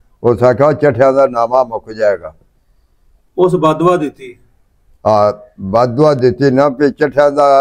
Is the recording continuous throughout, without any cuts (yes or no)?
yes